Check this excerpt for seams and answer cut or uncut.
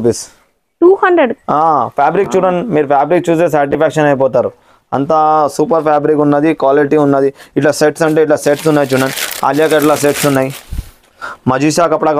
uncut